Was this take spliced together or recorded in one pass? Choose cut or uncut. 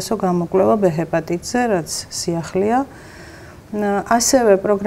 uncut